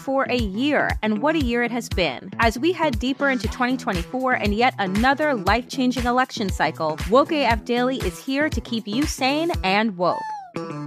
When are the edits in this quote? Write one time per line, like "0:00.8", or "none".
none